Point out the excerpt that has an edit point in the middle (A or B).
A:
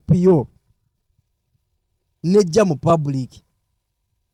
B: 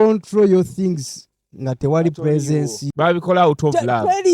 B